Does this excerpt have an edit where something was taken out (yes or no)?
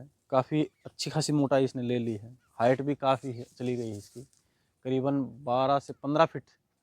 no